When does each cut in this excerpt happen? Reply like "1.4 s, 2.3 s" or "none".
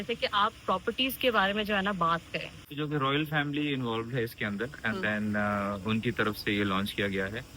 2.6 s